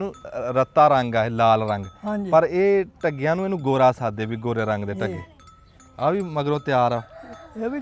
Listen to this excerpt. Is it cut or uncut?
uncut